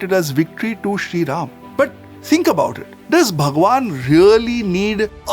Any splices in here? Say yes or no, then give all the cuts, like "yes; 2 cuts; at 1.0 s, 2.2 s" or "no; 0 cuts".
no; 0 cuts